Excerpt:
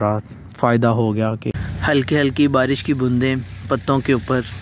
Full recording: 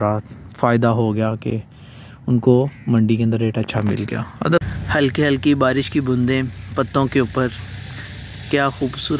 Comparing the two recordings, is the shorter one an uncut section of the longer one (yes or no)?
no